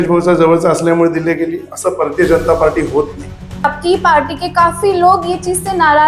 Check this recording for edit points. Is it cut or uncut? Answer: cut